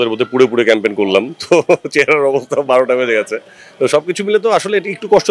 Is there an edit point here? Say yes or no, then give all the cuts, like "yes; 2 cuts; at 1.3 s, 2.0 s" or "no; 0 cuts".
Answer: no; 0 cuts